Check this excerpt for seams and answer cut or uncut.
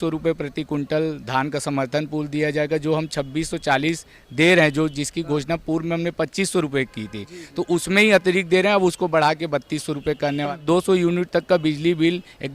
cut